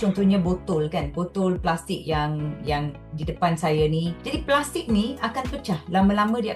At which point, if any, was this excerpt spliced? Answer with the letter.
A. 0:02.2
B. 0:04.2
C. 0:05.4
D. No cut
B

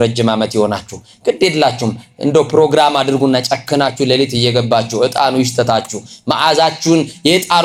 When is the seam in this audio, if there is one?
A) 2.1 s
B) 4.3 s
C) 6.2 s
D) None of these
D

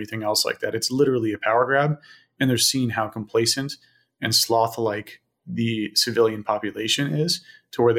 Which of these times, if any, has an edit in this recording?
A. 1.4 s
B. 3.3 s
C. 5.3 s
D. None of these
D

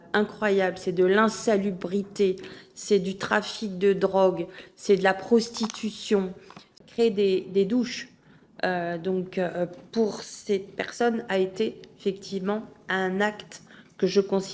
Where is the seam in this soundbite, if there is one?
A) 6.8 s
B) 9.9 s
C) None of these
A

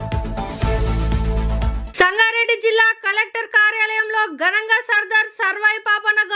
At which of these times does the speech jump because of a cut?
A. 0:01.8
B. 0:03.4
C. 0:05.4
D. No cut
A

